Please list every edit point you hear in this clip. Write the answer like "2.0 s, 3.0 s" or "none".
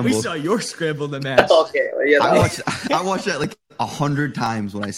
none